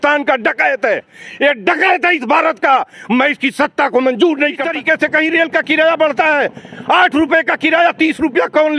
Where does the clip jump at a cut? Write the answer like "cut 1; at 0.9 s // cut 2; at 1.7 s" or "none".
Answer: cut 1; at 4.7 s